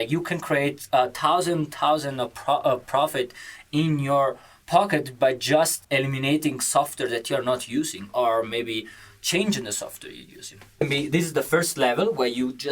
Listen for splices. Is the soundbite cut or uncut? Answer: cut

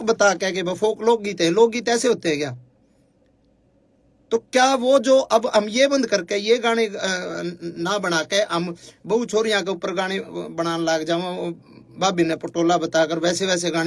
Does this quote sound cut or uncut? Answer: uncut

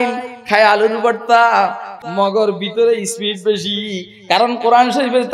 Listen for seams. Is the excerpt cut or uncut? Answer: cut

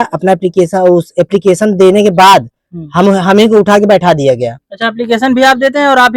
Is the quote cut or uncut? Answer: uncut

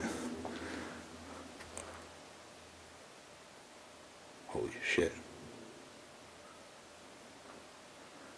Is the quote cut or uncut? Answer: uncut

